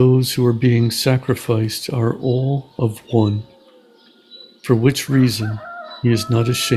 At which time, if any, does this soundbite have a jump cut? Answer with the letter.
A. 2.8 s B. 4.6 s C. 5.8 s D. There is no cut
D